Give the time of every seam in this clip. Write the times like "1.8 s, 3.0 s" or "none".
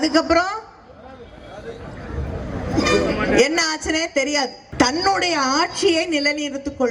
4.6 s